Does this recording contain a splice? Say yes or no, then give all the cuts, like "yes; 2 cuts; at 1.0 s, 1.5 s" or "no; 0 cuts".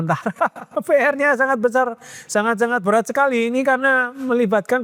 no; 0 cuts